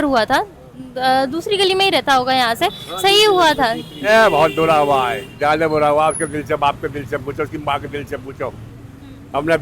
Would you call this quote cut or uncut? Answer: cut